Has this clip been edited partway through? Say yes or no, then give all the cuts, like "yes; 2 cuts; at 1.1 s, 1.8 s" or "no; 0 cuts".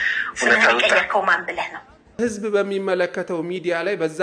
yes; 1 cut; at 2.1 s